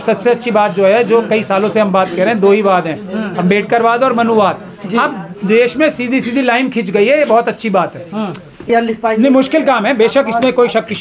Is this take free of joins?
no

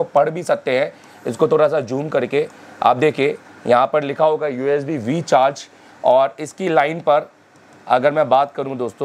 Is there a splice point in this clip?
no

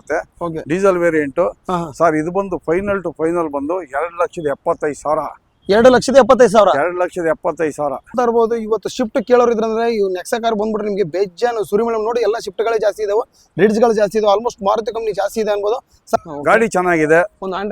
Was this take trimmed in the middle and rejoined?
yes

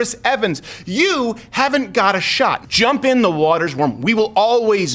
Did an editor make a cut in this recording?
yes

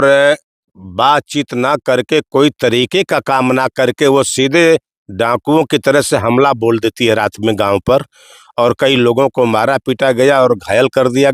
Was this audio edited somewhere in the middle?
no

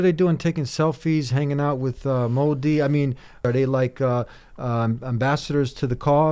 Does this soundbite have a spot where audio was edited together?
yes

